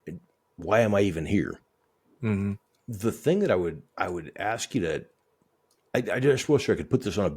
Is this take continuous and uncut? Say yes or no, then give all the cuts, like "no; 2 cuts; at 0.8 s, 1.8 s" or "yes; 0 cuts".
yes; 0 cuts